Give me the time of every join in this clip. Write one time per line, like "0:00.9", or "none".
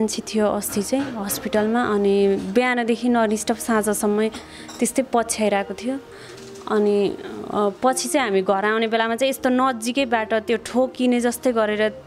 none